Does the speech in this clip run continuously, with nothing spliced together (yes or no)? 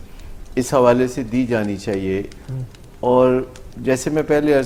yes